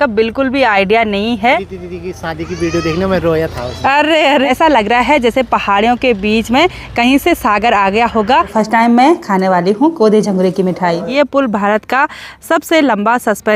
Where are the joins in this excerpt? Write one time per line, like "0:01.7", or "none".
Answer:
0:01.7
0:04.5
0:08.5
0:11.1